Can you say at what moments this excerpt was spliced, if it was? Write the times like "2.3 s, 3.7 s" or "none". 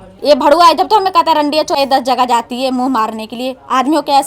1.8 s